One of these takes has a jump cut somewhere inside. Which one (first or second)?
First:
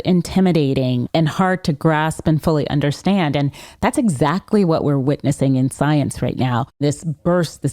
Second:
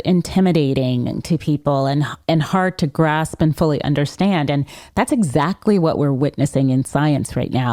first